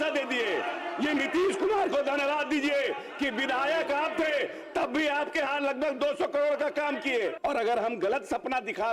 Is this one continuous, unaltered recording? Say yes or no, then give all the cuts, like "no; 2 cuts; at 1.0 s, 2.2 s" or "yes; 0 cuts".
no; 1 cut; at 7.4 s